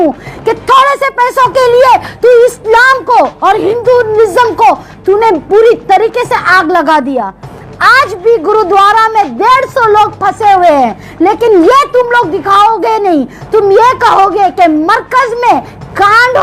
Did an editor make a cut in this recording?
no; 0 cuts

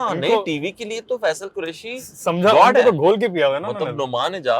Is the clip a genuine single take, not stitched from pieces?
yes; 0 cuts

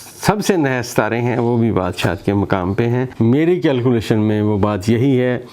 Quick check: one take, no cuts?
no; 1 cut; at 3.1 s

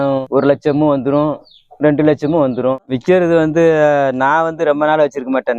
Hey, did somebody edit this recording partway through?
yes; 1 cut; at 2.9 s

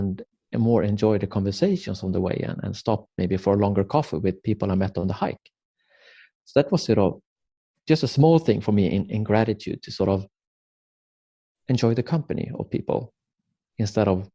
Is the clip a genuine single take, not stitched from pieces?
yes; 0 cuts

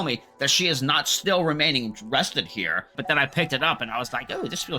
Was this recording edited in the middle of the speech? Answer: yes; 1 cut; at 2.9 s

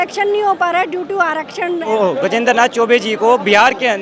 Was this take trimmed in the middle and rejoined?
yes; 1 cut; at 1.9 s

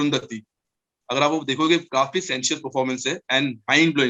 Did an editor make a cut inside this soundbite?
no; 0 cuts

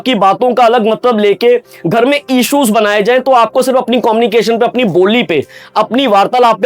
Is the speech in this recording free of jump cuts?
yes; 0 cuts

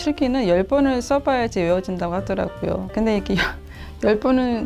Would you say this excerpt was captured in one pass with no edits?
yes; 0 cuts

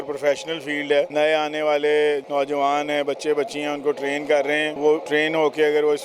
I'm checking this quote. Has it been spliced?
yes; 3 cuts; at 1.1 s, 2.3 s, 5.0 s

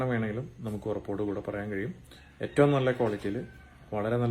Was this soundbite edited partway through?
no; 0 cuts

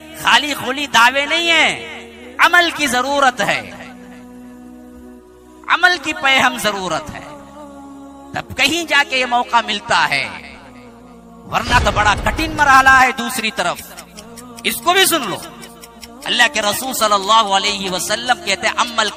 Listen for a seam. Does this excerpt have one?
no; 0 cuts

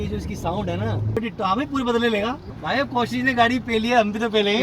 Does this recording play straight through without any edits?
no; 2 cuts; at 1.2 s, 2.5 s

